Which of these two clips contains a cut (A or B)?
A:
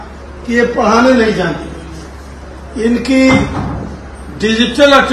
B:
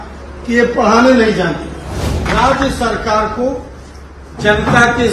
B